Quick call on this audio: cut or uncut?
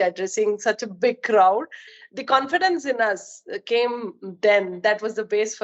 cut